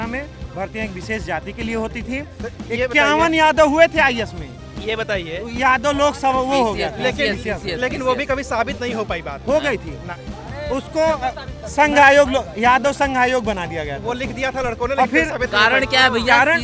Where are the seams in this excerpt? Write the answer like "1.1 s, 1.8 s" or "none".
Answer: none